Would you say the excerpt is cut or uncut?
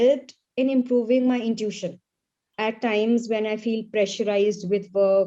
cut